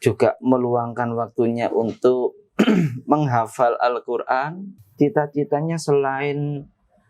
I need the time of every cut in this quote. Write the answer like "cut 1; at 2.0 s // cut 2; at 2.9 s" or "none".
cut 1; at 4.8 s